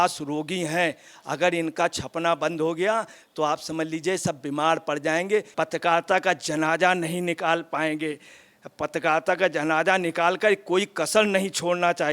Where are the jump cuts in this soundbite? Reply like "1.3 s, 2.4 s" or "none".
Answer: 5.5 s